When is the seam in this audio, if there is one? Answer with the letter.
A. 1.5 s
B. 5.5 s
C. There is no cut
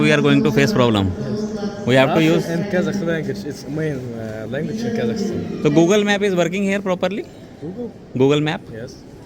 C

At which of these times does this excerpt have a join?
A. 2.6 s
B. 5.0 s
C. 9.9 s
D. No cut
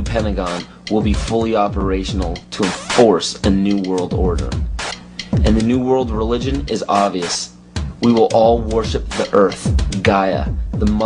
A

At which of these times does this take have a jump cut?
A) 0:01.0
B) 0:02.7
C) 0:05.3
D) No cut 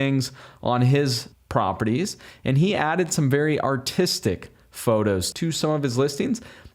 C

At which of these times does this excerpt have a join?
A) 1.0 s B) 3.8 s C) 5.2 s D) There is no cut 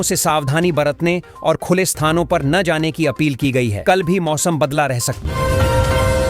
C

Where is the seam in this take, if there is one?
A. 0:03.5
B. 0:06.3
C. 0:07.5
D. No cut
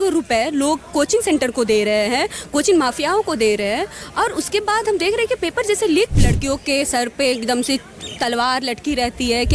B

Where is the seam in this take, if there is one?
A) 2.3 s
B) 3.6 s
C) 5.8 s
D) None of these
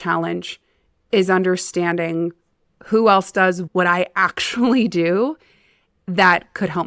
B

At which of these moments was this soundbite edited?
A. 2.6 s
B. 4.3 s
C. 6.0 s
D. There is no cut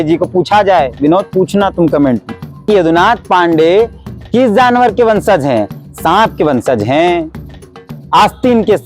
A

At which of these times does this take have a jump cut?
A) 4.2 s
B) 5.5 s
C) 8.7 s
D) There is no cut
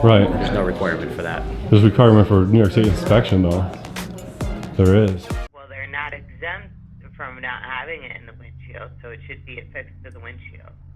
B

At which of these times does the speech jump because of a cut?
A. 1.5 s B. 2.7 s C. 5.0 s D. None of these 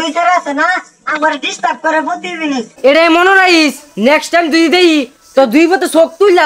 B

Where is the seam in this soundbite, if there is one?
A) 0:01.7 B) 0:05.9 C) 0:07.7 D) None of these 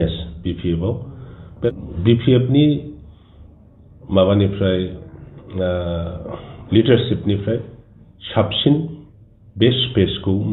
A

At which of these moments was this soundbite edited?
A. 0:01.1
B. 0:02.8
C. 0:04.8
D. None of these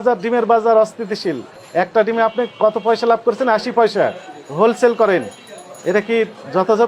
A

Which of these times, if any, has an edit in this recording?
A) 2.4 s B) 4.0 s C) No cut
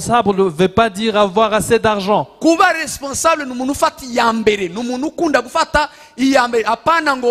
C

